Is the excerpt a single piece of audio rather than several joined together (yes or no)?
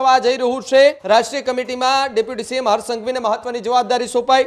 no